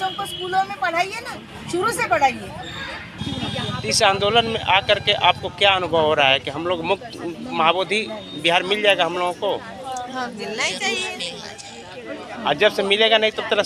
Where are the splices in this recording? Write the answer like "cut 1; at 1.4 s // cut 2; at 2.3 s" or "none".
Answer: cut 1; at 3.1 s